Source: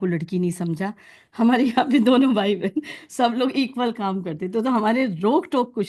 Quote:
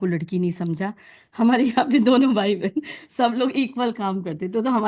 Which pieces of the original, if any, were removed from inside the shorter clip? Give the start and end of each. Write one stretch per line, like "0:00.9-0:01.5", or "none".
none